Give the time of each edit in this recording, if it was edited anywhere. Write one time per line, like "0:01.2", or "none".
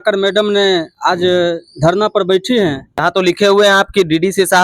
0:02.9